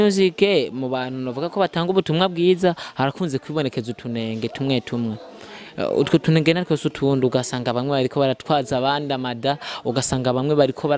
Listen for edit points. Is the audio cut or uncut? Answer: uncut